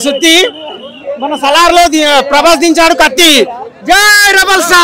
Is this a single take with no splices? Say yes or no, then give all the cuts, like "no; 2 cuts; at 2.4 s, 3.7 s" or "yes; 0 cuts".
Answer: yes; 0 cuts